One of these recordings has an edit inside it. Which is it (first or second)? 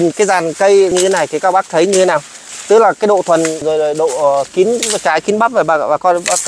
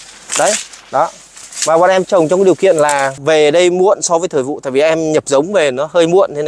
first